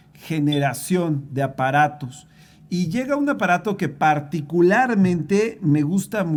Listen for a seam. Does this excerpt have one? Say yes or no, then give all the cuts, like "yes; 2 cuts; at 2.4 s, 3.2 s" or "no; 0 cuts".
no; 0 cuts